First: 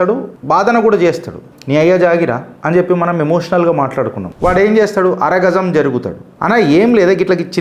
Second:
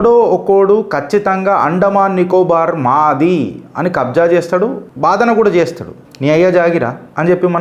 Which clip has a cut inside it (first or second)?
first